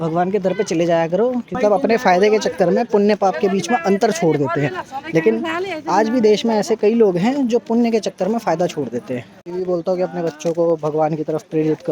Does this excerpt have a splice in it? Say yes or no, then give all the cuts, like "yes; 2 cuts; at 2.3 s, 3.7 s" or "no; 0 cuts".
yes; 2 cuts; at 1.6 s, 9.4 s